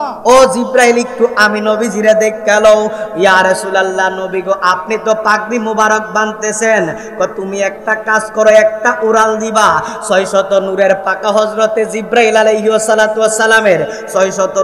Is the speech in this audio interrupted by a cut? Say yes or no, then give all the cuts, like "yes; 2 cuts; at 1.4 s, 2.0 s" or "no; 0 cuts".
no; 0 cuts